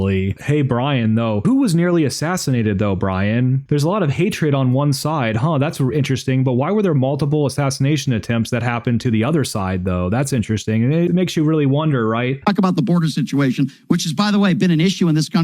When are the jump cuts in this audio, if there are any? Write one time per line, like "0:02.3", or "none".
0:12.3